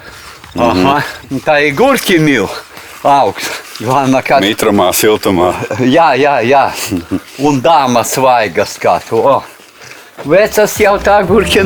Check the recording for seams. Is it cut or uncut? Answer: uncut